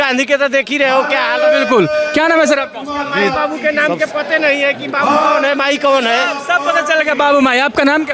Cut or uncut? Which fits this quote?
uncut